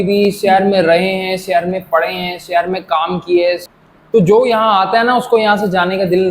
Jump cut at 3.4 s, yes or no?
yes